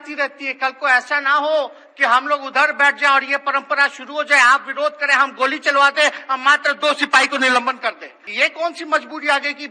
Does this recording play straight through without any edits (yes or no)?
no